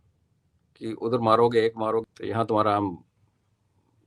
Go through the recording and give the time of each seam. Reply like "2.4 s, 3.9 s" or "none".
2.0 s